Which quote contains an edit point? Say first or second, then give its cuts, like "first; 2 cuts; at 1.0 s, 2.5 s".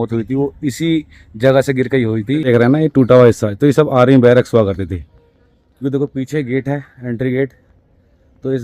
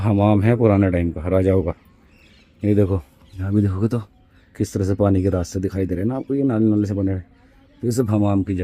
first; 1 cut; at 2.5 s